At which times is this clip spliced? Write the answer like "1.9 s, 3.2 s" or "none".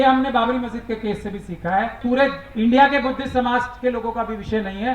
2.0 s